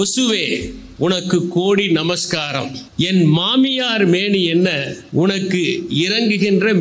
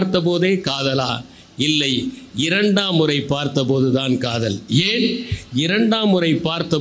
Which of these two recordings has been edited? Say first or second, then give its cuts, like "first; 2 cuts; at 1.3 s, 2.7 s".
first; 2 cuts; at 2.8 s, 4.9 s